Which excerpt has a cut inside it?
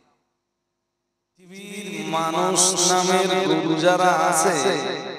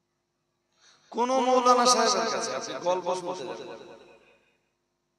first; 1 cut; at 1.7 s

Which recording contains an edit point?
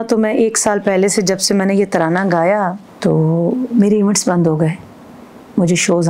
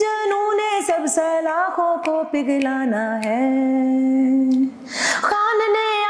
first; 1 cut; at 2.9 s

